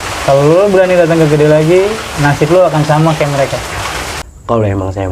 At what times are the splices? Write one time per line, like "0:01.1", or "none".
0:04.0

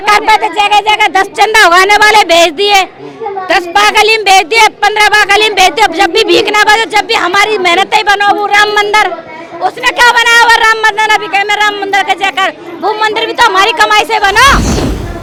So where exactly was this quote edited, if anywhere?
none

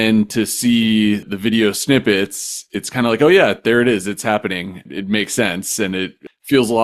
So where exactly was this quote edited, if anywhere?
none

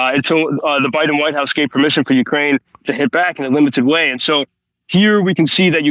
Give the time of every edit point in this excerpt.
none

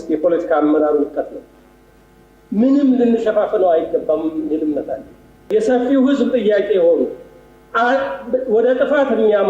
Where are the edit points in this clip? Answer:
0:05.5

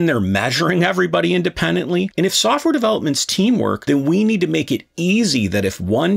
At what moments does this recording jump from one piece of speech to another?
0:02.1
0:03.8

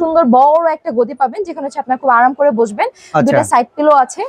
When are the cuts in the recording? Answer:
none

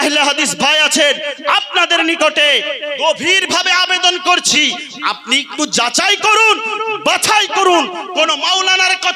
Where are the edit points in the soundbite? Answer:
none

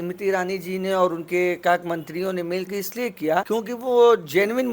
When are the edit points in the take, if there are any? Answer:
0:03.5

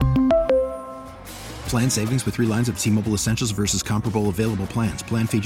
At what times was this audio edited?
none

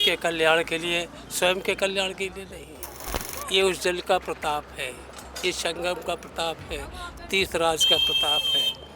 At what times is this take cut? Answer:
0:03.0

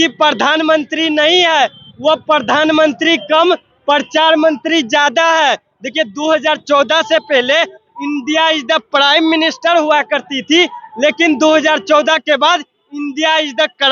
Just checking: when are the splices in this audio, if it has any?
none

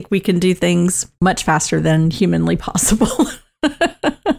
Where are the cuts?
0:01.0

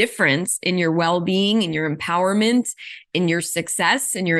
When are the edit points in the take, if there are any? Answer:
none

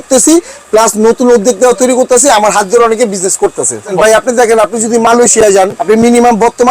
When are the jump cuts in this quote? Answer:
0:03.9
0:05.8

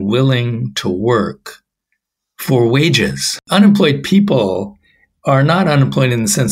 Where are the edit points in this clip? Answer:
0:03.4

